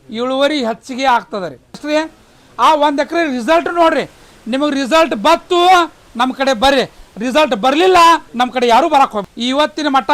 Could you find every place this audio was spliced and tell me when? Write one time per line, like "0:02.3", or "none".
0:01.8
0:09.2